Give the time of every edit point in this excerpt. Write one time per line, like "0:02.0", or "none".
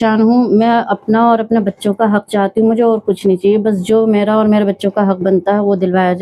none

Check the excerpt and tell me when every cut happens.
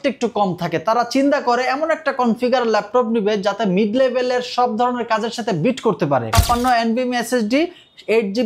0:06.4

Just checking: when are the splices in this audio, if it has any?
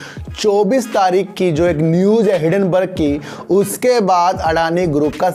none

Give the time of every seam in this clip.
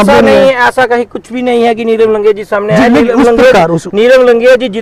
none

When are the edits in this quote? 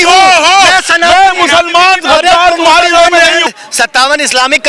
0:03.5

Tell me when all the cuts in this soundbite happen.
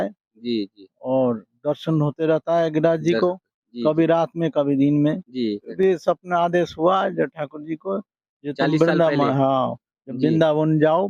0:05.7

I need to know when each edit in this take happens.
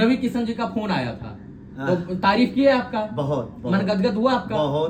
none

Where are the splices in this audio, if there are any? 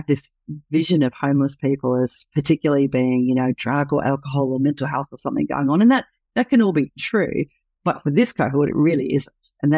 none

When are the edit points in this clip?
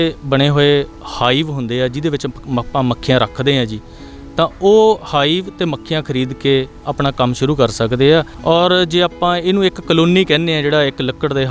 0:08.3

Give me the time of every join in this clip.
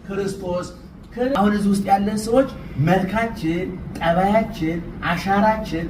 0:01.3

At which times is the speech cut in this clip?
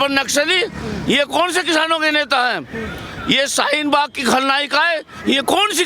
none

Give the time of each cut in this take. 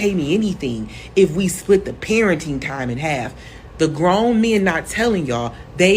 0:02.6

